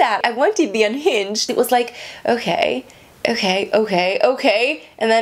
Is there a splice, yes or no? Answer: yes